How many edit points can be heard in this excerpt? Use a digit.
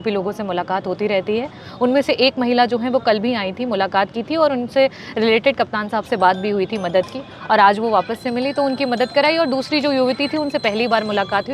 0